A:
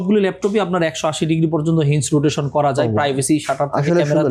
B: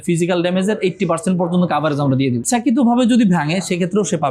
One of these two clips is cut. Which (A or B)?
B